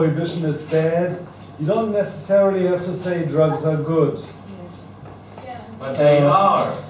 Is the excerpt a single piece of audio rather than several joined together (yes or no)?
yes